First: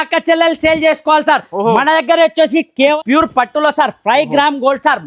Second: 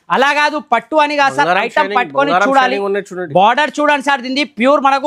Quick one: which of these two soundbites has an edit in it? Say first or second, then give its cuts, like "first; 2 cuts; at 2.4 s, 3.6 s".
first; 1 cut; at 3.0 s